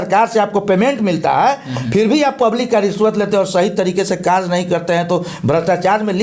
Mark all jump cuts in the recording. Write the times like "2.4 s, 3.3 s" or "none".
none

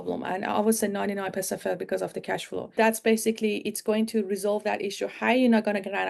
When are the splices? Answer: 2.7 s

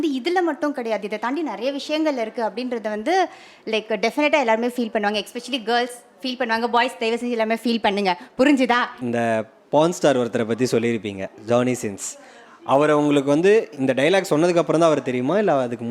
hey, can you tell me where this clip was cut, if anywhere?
9.0 s

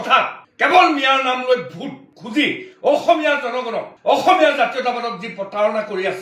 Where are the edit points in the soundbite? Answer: none

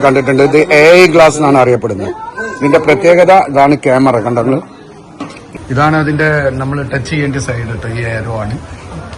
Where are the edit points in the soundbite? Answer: 5.4 s

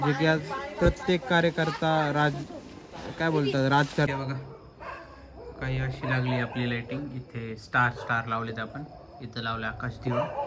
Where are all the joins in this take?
4.1 s

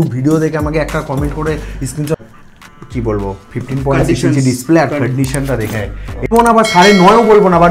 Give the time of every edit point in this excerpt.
2.2 s, 6.3 s

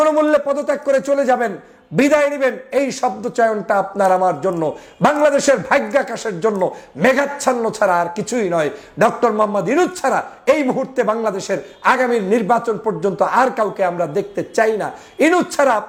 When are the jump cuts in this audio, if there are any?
none

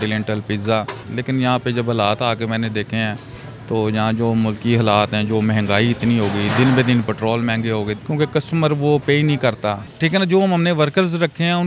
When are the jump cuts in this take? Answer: 1.0 s, 8.0 s, 9.9 s

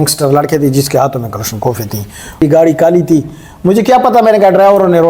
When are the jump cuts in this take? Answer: 2.4 s

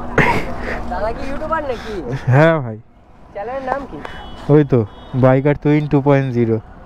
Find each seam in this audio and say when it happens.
none

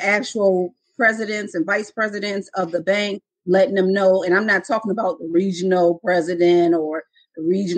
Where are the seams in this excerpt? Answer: none

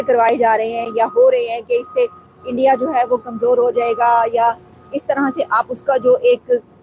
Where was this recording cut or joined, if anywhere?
none

